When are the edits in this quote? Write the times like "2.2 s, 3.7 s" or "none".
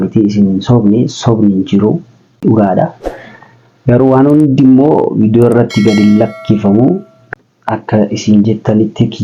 2.4 s, 7.2 s